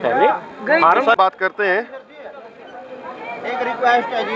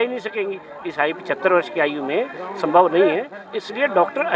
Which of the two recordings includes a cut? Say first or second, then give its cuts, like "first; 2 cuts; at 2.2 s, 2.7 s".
first; 1 cut; at 1.2 s